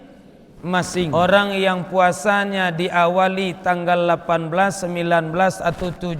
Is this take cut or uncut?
cut